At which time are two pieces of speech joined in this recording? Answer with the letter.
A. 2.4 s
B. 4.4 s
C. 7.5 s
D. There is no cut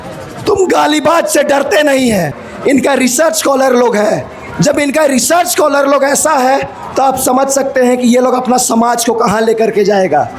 A